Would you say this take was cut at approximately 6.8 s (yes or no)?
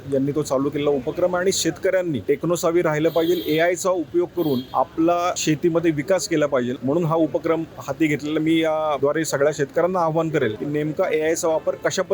yes